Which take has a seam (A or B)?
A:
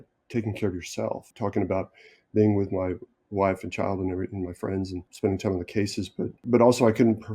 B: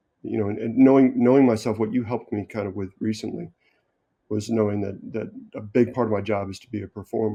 A